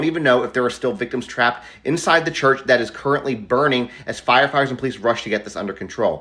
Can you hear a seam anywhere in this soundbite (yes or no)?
no